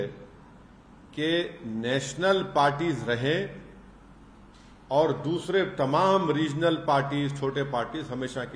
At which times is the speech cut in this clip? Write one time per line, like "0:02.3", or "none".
none

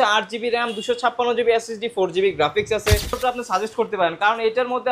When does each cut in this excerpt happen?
0:03.2

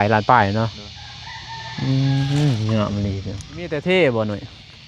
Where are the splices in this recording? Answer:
0:03.8

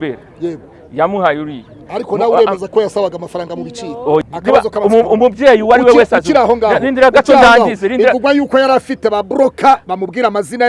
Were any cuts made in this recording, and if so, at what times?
0:04.2

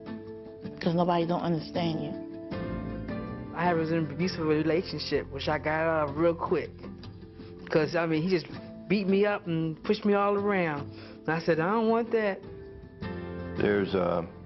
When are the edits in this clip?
none

